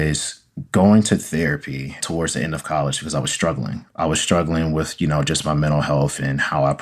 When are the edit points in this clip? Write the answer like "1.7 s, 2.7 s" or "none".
none